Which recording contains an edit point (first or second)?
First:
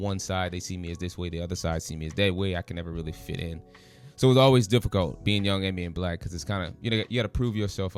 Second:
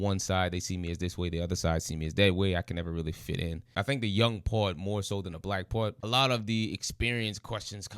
second